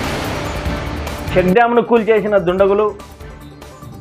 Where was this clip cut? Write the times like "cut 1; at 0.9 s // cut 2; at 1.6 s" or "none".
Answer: cut 1; at 1.3 s